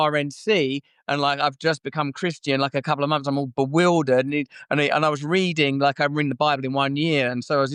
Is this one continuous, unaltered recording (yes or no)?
yes